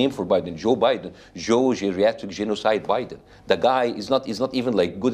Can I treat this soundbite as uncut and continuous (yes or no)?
yes